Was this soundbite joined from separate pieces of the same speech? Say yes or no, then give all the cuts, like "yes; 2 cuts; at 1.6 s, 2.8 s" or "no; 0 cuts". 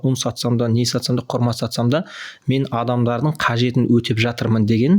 no; 0 cuts